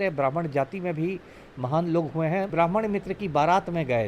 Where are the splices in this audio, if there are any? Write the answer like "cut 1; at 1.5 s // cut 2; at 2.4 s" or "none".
cut 1; at 2.5 s